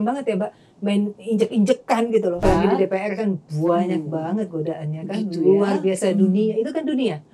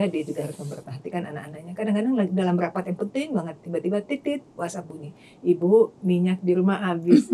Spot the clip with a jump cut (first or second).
first